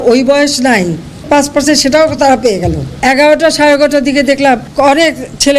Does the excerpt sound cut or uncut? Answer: cut